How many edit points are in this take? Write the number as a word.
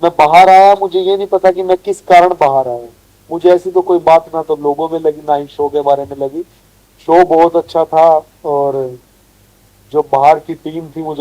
zero